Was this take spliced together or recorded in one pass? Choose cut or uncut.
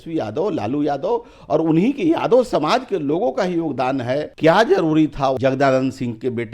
cut